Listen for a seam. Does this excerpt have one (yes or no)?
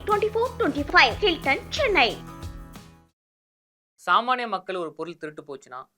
yes